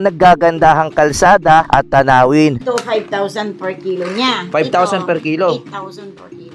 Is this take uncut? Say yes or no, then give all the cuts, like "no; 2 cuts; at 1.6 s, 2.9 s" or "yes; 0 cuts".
no; 2 cuts; at 1.7 s, 2.5 s